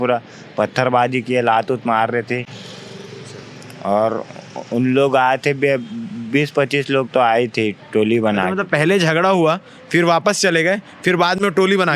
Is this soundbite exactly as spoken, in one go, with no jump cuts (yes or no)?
yes